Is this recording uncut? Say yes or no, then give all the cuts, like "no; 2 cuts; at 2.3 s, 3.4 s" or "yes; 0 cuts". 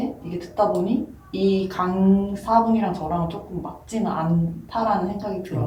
yes; 0 cuts